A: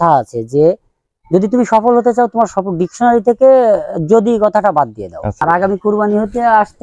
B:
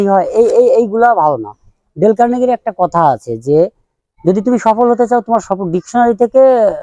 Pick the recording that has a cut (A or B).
A